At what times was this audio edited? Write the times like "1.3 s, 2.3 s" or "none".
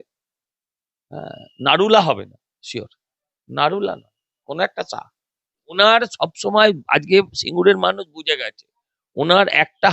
5.6 s

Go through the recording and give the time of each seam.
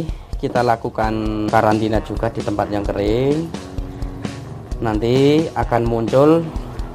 1.5 s

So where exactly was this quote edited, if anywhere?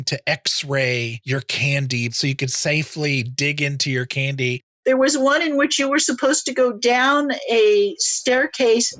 1.2 s, 2.1 s, 4.6 s

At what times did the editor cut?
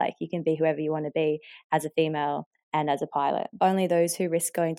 3.5 s

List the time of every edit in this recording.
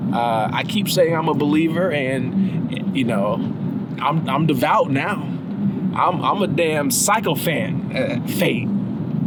none

